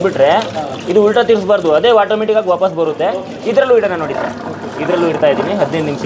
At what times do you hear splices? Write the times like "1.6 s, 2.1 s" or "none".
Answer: none